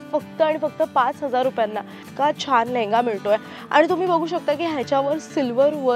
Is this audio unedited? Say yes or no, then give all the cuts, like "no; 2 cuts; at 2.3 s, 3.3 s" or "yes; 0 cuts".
no; 1 cut; at 2.0 s